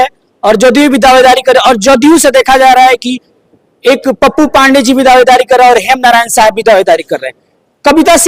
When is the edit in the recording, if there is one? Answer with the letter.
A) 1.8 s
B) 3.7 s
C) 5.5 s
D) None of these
D